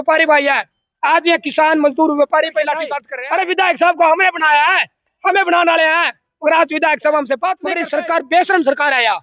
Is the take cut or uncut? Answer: cut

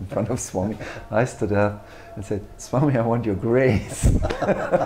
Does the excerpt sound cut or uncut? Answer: uncut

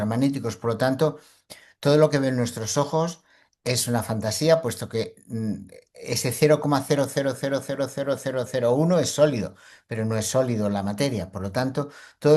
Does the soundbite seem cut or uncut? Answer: uncut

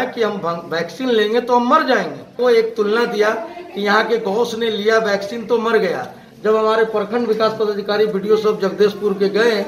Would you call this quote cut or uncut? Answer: cut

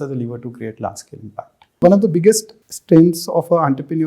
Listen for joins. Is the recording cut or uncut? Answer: cut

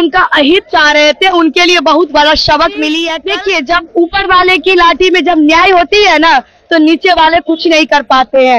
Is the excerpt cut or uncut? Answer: cut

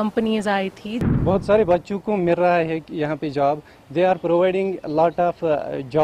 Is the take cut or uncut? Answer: cut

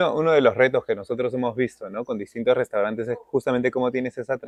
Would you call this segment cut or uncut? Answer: uncut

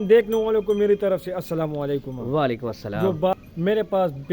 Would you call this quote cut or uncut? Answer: cut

